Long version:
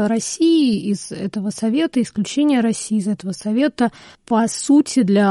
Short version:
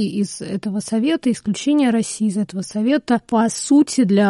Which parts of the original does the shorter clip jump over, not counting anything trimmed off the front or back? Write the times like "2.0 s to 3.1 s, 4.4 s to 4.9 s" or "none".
4.0 s to 4.2 s